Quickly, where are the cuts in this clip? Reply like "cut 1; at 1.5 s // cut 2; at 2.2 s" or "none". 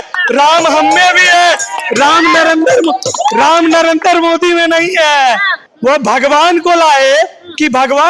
cut 1; at 5.6 s